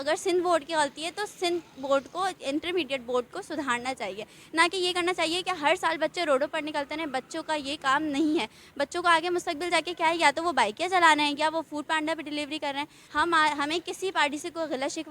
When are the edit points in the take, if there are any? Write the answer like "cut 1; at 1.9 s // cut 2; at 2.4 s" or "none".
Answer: cut 1; at 13.0 s